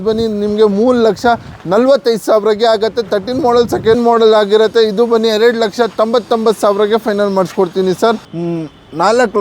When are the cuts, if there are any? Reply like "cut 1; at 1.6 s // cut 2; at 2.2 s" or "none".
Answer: cut 1; at 4.0 s // cut 2; at 8.2 s